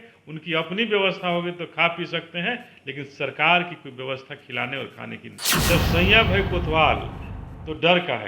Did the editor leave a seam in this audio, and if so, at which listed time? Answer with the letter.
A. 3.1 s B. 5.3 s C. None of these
B